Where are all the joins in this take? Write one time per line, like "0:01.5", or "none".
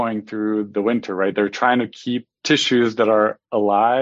none